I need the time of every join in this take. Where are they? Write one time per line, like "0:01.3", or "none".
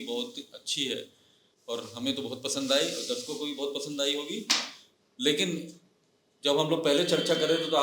none